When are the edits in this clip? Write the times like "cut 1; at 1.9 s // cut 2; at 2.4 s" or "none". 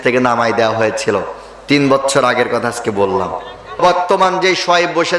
cut 1; at 3.8 s